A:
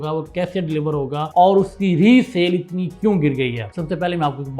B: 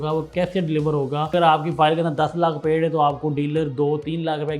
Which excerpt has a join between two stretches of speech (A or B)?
B